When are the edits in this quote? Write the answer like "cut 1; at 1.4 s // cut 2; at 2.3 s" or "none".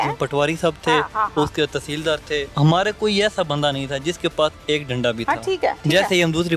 cut 1; at 2.5 s // cut 2; at 5.8 s